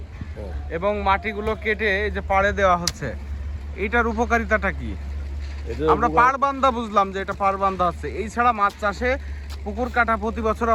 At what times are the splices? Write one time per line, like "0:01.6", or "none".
none